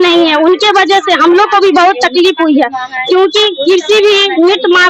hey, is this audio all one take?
yes; 0 cuts

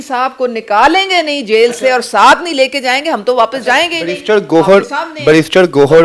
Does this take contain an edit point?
no; 0 cuts

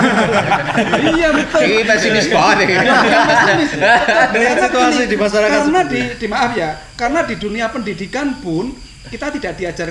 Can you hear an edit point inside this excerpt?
no; 0 cuts

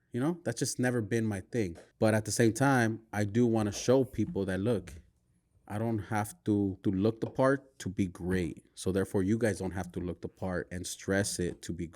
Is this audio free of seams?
no; 2 cuts; at 1.8 s, 6.8 s

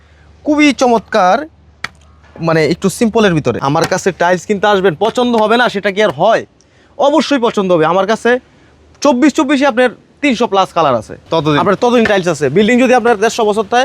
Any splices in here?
yes; 2 cuts; at 3.6 s, 11.1 s

